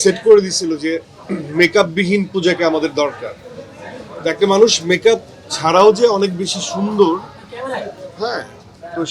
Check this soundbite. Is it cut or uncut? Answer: uncut